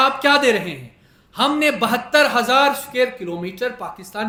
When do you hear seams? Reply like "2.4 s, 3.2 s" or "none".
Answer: none